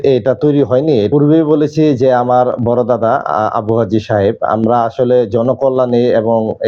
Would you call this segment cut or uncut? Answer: cut